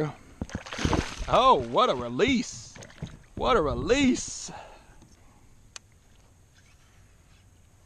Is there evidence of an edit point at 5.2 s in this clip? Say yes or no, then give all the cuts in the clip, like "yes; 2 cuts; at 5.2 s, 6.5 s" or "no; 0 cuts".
yes; 1 cut; at 5.2 s